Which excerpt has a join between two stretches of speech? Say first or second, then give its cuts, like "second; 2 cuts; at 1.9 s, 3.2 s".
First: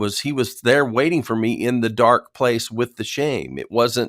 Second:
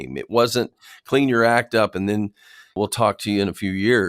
second; 1 cut; at 2.8 s